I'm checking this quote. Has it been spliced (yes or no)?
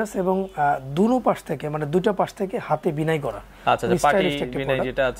no